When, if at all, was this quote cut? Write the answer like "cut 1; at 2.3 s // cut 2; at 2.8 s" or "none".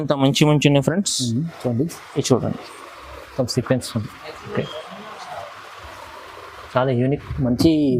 cut 1; at 5.8 s